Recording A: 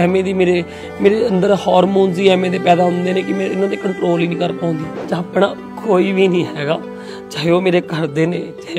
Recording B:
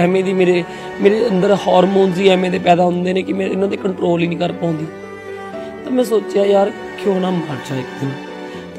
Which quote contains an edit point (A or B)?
A